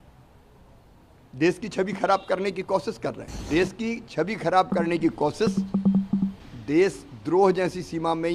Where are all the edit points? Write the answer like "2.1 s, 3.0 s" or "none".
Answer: 3.3 s, 6.5 s